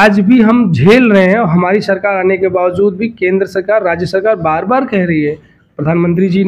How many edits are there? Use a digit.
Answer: 0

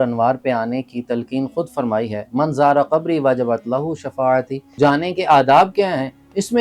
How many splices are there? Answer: 1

